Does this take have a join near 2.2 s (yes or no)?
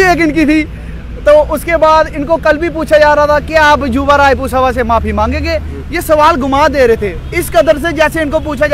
no